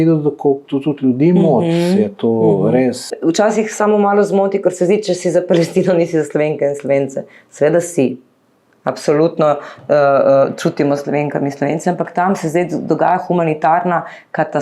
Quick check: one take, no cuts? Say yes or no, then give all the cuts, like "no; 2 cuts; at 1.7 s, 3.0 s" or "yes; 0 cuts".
no; 1 cut; at 3.1 s